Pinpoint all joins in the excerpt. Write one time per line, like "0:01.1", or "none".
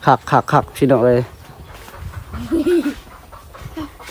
none